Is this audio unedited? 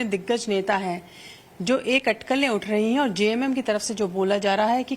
no; 1 cut; at 3.4 s

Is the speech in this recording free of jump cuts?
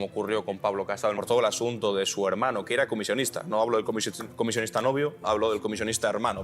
no; 1 cut; at 1.2 s

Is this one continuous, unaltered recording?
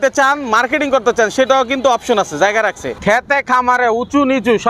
no; 1 cut; at 2.9 s

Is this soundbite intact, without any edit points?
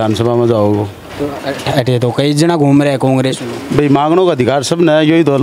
yes; 0 cuts

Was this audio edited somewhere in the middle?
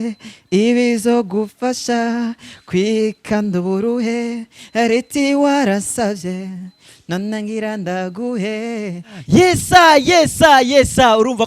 yes; 1 cut; at 9.1 s

